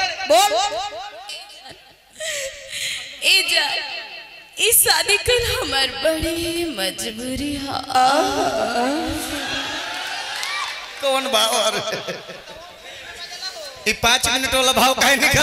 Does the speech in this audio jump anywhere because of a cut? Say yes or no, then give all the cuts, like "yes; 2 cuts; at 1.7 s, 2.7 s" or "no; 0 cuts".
no; 0 cuts